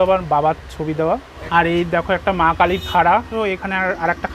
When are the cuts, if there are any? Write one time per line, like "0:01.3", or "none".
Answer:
0:01.3
0:03.3